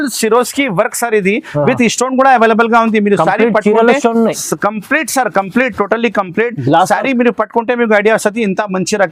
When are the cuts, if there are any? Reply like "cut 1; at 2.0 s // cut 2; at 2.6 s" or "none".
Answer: none